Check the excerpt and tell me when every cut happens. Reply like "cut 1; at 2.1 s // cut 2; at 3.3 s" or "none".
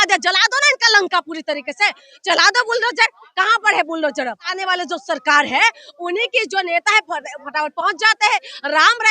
cut 1; at 4.5 s